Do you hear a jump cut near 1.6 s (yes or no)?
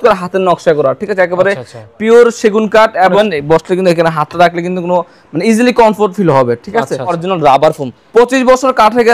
no